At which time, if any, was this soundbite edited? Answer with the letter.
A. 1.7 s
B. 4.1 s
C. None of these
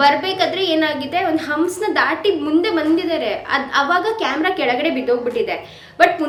C